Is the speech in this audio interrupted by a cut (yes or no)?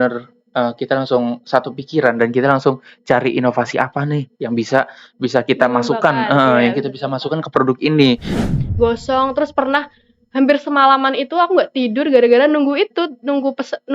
yes